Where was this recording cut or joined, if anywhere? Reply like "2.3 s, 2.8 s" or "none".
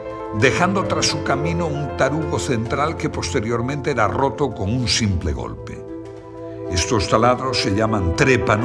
none